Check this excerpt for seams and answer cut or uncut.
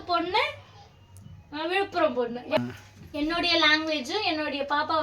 cut